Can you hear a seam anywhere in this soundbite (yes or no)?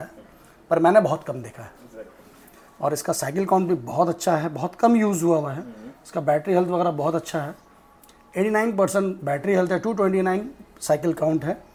no